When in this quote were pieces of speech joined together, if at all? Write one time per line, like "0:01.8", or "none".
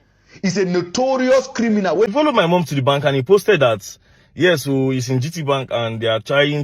0:02.1